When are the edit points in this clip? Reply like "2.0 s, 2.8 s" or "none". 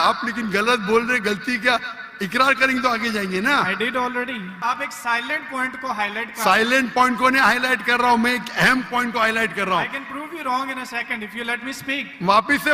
4.6 s